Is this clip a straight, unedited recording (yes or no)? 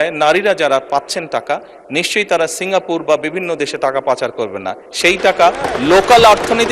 yes